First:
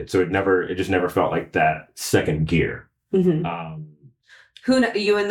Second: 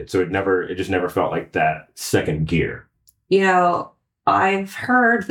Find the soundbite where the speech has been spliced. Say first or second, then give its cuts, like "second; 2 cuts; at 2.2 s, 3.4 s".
second; 1 cut; at 3.0 s